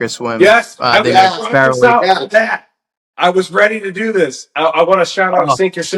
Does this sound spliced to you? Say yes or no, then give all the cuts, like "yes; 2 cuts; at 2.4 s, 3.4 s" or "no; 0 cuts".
no; 0 cuts